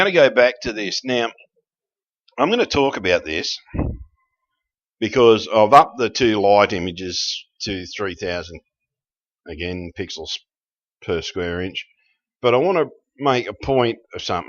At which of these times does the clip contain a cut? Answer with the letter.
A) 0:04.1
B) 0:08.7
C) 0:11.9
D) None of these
D